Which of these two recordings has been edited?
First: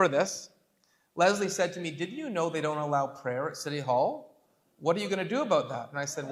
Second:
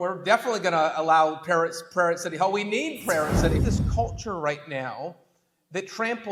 second; 1 cut; at 3.5 s

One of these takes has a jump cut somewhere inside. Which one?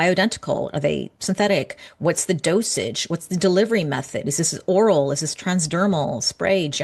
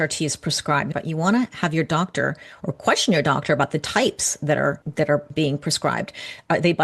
second; 2 cuts; at 0.9 s, 4.8 s

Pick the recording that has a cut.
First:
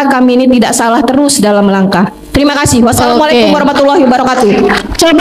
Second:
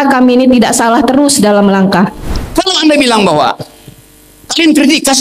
second; 1 cut; at 2.2 s

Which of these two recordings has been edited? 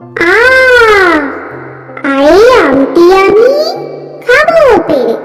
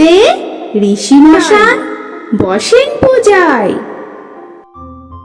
second; 1 cut; at 4.3 s

